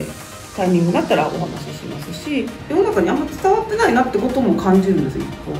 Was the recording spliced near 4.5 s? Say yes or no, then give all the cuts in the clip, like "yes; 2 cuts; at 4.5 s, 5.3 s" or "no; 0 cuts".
no; 1 cut; at 2.6 s